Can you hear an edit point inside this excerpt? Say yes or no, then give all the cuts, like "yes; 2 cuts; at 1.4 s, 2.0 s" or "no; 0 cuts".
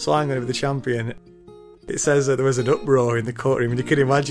yes; 1 cut; at 1.5 s